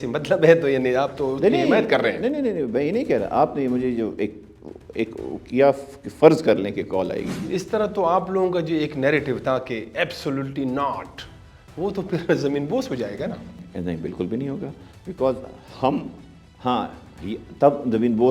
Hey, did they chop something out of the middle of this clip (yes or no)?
yes